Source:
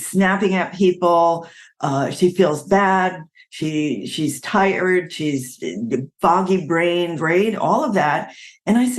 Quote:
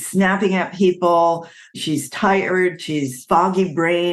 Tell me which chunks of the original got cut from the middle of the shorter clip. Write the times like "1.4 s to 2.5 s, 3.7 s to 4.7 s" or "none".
1.7 s to 4.0 s, 5.5 s to 6.1 s